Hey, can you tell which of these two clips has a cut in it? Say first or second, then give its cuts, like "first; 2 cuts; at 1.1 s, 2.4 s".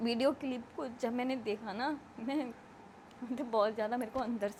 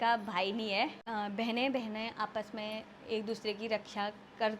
second; 1 cut; at 1.0 s